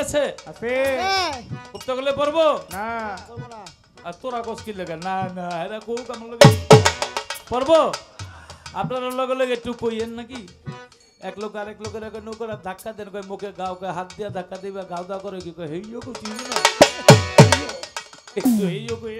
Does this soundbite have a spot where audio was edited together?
no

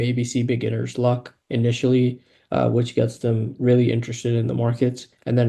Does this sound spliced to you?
no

